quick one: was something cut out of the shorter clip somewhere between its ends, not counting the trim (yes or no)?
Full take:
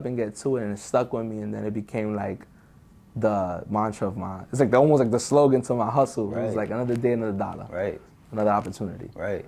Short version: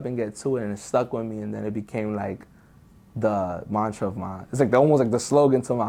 no